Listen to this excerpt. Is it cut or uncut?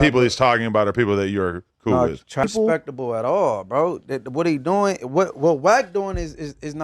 cut